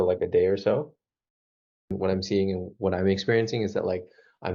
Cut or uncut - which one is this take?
cut